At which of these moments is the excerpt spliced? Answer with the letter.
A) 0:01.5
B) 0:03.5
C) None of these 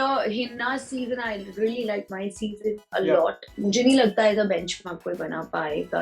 B